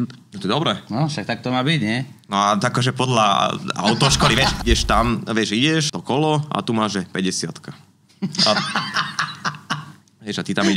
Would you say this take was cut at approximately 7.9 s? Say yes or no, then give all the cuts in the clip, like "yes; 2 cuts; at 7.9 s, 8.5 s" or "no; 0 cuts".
no; 2 cuts; at 4.6 s, 5.9 s